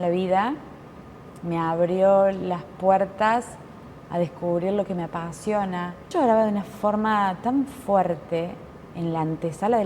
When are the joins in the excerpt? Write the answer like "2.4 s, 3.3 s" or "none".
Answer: 6.1 s